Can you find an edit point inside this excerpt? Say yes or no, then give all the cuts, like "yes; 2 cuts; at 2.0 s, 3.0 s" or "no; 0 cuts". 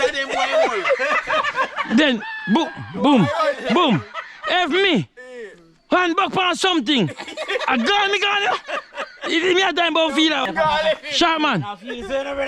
yes; 1 cut; at 10.4 s